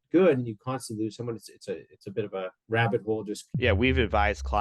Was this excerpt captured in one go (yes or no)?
no